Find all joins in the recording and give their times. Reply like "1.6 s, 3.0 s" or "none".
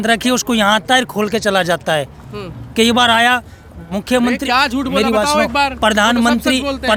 none